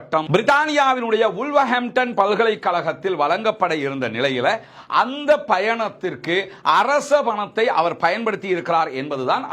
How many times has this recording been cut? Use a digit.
0